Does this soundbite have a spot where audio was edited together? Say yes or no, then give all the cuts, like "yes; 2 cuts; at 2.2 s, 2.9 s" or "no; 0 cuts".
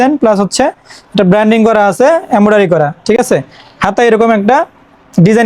no; 0 cuts